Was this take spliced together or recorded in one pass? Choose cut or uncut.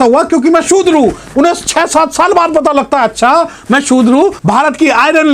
cut